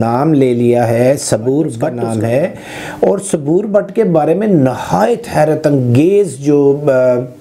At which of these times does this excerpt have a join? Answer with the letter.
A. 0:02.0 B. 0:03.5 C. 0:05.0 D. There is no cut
A